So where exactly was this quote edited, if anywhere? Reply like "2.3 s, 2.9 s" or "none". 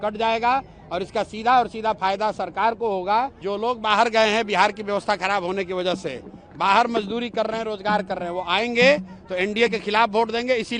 3.4 s